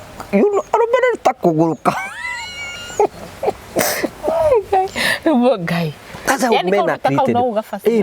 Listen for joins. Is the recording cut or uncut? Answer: uncut